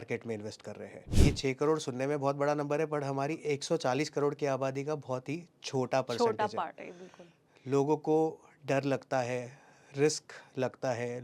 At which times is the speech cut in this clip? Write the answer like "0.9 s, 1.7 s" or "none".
1.1 s